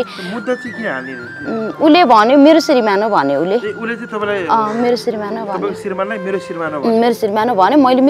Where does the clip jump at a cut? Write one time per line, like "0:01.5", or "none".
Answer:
none